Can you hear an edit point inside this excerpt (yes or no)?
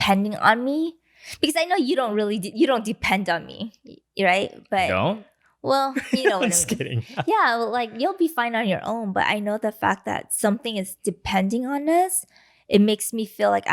no